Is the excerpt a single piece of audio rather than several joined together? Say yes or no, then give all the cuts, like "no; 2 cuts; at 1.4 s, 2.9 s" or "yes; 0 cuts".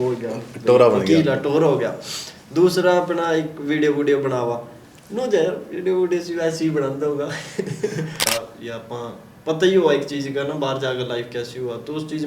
yes; 0 cuts